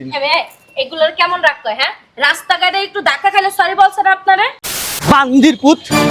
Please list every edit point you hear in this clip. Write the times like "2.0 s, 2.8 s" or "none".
4.8 s